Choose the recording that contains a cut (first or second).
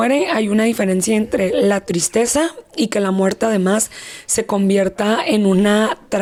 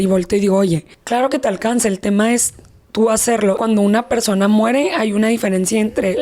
second